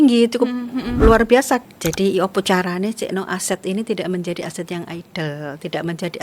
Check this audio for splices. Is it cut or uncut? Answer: cut